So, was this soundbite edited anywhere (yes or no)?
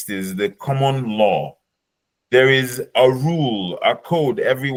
no